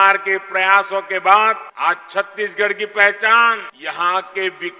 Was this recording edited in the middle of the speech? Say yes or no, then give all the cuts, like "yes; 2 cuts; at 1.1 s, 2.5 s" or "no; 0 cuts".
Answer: yes; 2 cuts; at 1.7 s, 3.7 s